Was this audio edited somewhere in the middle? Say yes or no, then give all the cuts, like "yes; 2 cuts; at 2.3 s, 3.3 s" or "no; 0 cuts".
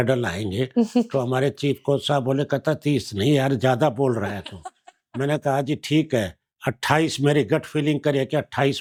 no; 0 cuts